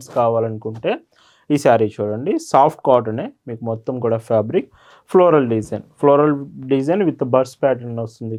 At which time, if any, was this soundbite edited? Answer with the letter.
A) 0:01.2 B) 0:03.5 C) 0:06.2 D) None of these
D